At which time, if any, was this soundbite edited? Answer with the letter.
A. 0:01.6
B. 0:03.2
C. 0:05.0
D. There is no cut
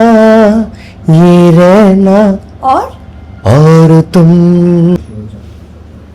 C